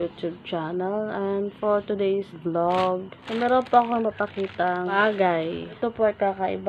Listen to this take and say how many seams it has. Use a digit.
4